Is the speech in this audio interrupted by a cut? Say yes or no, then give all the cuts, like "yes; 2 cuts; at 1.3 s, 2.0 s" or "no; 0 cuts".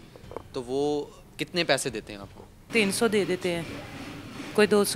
yes; 1 cut; at 2.6 s